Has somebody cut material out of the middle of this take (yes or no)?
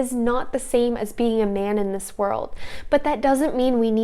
no